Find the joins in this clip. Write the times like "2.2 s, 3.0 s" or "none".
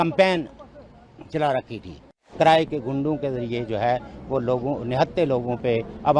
2.2 s